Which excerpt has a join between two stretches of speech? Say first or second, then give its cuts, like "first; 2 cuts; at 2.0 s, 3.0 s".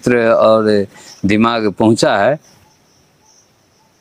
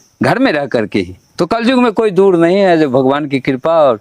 second; 1 cut; at 1.2 s